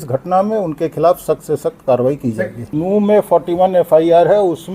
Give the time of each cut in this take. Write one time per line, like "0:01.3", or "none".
0:02.6